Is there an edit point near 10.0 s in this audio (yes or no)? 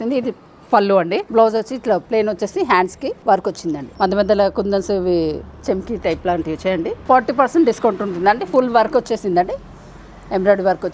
no